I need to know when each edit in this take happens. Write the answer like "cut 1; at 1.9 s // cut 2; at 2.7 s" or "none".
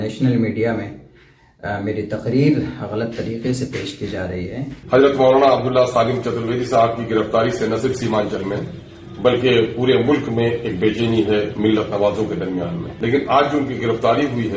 cut 1; at 4.7 s // cut 2; at 12.8 s

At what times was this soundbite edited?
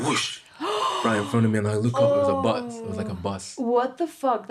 none

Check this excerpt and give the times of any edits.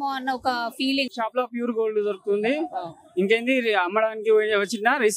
cut 1; at 1.1 s

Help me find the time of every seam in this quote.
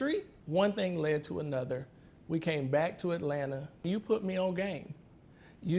cut 1; at 3.8 s

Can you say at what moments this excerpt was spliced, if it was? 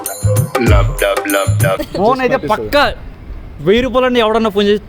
cut 1; at 1.8 s

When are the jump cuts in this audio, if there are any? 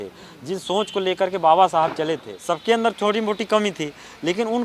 cut 1; at 2.3 s

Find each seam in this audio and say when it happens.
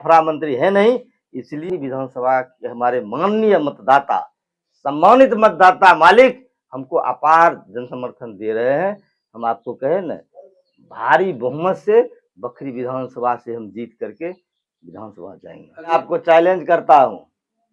cut 1; at 1.5 s // cut 2; at 15.9 s

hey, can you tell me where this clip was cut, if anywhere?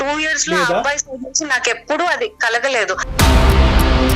cut 1; at 3.1 s

